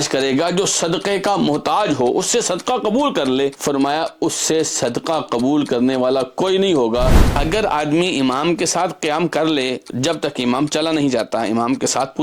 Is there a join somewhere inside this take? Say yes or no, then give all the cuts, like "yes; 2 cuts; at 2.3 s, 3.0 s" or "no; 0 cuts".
yes; 2 cuts; at 3.6 s, 7.2 s